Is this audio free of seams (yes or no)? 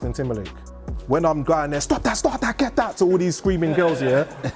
no